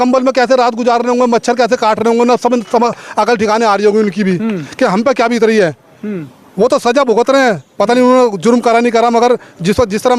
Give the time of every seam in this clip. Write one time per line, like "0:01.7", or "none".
none